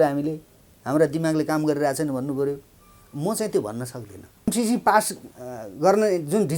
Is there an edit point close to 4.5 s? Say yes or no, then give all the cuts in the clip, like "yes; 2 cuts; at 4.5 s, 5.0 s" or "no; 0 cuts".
yes; 1 cut; at 4.5 s